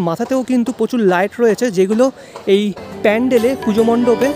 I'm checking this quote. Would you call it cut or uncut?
uncut